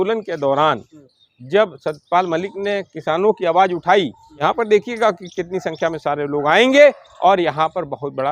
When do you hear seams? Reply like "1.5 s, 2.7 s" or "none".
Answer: 4.2 s